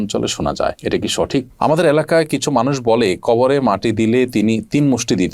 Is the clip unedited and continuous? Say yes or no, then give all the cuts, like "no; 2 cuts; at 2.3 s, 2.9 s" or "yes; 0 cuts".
no; 1 cut; at 1.5 s